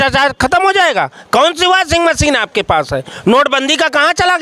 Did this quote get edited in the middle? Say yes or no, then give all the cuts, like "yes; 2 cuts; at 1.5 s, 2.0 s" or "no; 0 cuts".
no; 0 cuts